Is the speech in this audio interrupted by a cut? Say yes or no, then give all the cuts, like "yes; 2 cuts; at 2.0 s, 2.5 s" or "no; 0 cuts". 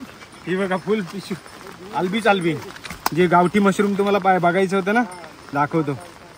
no; 0 cuts